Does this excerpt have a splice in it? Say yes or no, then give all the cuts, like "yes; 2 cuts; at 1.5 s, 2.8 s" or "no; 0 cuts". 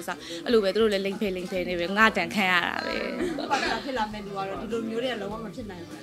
yes; 1 cut; at 3.4 s